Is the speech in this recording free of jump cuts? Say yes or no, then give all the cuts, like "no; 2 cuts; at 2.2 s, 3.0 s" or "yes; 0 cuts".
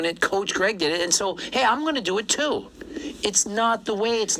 yes; 0 cuts